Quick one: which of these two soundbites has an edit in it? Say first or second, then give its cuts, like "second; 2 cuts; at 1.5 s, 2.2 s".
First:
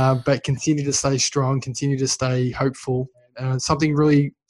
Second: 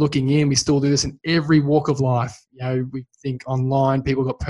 first; 1 cut; at 3.2 s